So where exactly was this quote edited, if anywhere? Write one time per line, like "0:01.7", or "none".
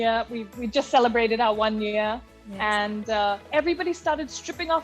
0:03.5